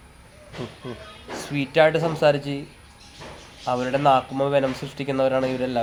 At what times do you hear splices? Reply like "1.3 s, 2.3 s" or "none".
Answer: none